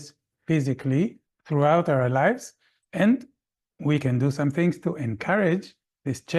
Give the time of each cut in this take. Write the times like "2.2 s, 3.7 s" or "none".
1.3 s

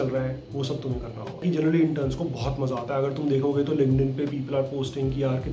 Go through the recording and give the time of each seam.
1.4 s

